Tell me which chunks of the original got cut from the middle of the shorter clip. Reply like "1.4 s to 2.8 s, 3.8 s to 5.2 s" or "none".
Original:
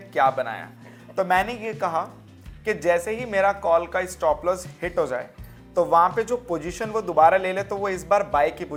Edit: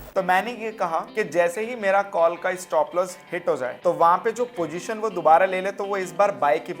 2.1 s to 2.6 s, 5.2 s to 5.6 s